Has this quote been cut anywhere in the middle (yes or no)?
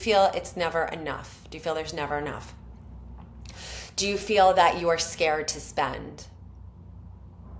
no